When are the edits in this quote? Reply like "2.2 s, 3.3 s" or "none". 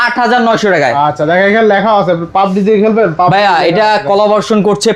none

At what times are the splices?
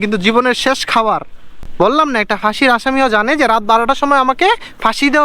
1.6 s

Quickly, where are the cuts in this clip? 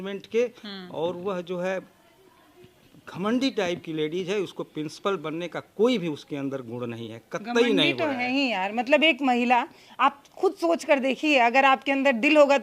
none

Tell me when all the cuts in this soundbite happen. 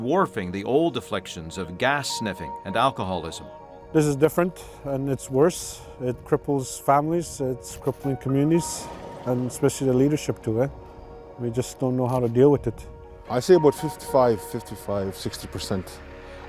none

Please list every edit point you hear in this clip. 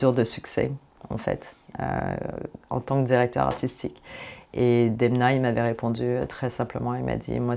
none

